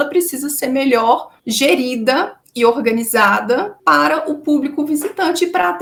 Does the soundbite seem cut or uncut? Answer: uncut